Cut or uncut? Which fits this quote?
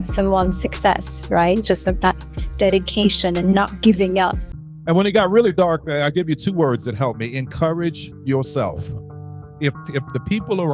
cut